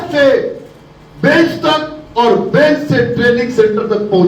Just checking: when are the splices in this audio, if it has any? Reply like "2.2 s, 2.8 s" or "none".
none